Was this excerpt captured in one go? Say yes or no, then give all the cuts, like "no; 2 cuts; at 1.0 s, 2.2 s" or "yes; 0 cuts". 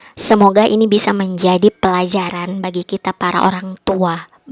yes; 0 cuts